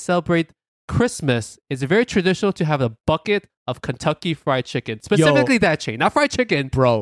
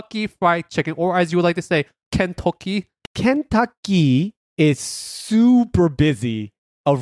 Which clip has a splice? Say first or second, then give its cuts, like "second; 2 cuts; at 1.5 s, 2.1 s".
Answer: second; 3 cuts; at 2.0 s, 3.0 s, 4.4 s